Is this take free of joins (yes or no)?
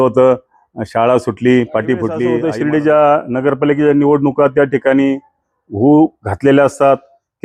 no